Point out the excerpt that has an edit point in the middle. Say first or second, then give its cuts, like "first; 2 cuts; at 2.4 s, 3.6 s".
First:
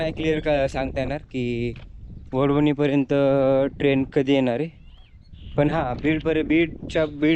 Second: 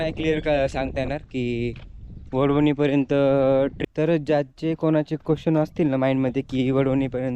second; 1 cut; at 3.8 s